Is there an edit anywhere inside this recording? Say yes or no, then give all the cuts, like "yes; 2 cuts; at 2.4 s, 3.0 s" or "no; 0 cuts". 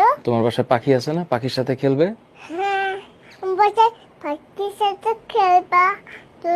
no; 0 cuts